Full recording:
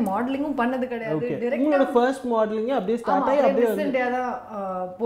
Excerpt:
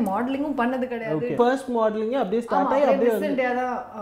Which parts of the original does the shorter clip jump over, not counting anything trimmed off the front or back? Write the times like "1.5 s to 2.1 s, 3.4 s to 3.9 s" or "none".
1.3 s to 1.9 s